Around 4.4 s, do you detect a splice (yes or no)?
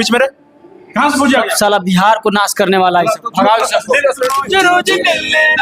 yes